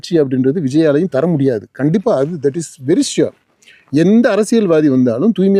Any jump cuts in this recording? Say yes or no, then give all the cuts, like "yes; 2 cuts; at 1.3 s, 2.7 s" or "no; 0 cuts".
no; 0 cuts